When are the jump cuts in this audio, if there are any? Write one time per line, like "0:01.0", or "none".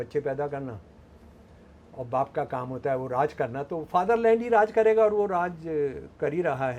none